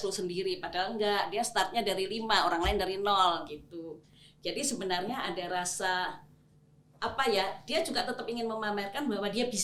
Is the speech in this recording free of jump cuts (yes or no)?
yes